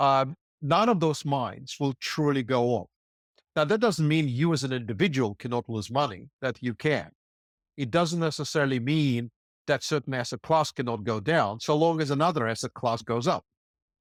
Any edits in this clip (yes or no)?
no